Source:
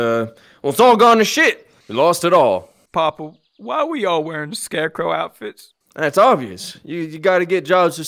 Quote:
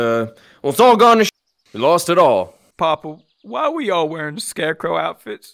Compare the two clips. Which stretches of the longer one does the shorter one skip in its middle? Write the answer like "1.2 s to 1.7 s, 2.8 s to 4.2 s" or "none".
1.4 s to 1.5 s